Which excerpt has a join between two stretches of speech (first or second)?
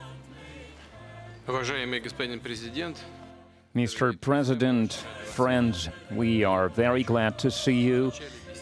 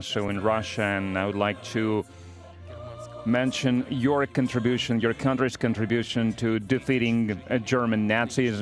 first